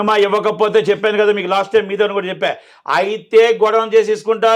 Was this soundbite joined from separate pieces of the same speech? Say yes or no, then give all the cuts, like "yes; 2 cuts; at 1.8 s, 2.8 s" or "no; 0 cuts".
no; 0 cuts